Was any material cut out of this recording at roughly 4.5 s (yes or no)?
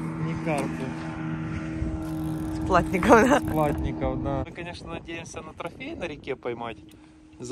yes